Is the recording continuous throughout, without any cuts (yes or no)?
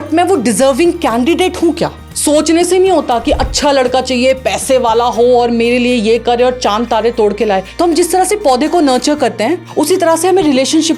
no